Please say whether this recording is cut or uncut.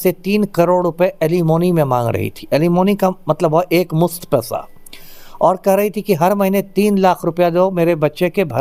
uncut